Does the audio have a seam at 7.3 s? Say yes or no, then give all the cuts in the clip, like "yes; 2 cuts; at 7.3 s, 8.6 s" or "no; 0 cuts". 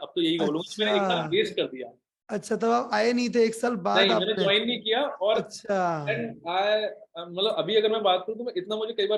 no; 0 cuts